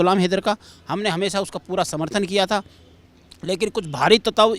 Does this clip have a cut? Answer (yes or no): no